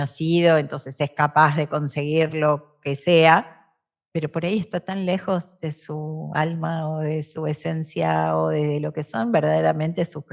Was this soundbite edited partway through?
no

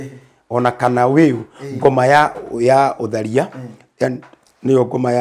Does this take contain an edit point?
no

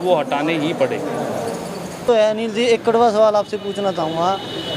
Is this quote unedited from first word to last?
no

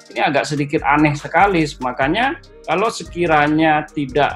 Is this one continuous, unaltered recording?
no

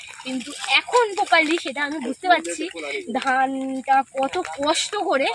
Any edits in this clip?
no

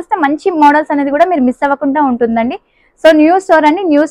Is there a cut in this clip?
no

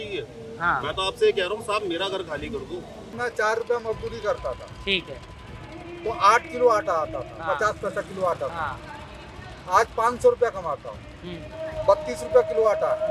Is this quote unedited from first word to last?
no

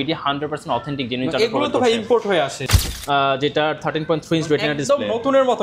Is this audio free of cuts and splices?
no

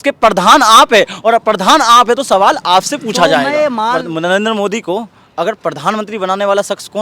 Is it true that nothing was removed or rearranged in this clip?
no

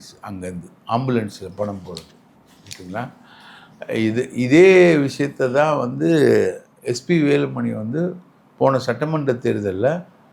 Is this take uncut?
yes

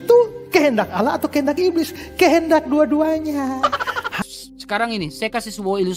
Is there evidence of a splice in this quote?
yes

